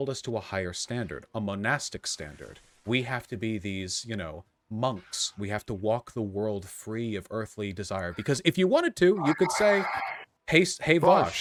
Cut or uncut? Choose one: uncut